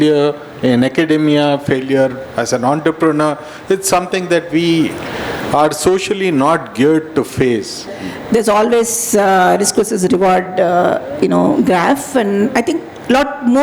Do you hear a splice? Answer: yes; 1 cut; at 7.9 s

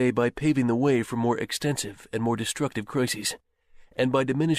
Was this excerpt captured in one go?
no; 1 cut; at 2.3 s

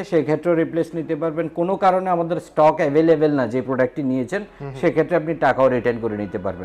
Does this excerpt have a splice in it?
no; 0 cuts

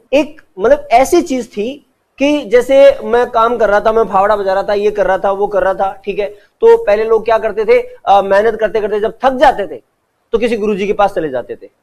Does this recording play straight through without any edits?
yes; 0 cuts

